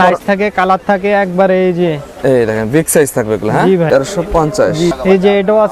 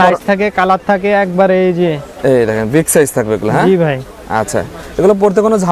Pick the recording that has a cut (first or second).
first